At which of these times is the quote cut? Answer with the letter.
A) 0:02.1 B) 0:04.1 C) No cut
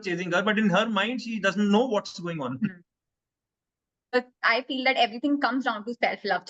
B